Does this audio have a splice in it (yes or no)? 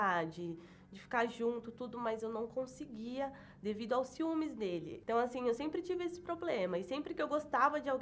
no